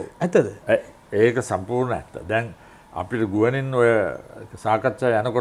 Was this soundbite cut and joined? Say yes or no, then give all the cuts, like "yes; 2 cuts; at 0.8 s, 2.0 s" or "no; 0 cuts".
no; 0 cuts